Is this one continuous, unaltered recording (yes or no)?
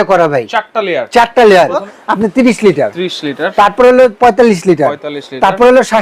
no